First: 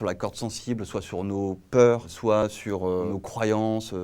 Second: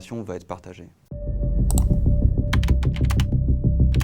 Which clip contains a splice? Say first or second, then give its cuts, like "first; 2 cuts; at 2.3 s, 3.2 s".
first; 1 cut; at 2.4 s